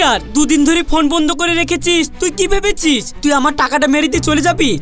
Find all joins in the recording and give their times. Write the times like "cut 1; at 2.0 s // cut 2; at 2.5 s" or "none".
none